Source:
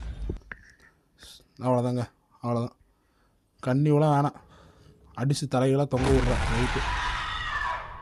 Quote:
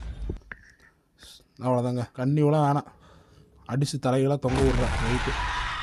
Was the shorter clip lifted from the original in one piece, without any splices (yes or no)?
no